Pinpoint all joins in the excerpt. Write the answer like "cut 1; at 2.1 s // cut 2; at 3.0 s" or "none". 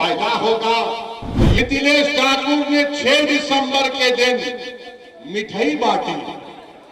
cut 1; at 1.6 s